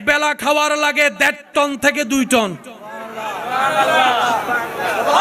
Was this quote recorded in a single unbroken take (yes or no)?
yes